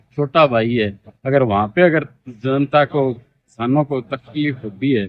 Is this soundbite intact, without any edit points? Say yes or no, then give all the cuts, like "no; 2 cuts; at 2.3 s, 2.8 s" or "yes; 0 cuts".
yes; 0 cuts